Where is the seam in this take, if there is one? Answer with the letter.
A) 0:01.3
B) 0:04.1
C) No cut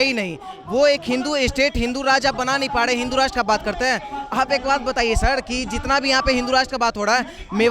C